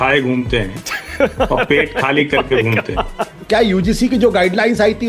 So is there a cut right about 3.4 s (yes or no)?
yes